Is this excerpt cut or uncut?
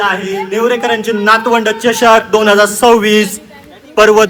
uncut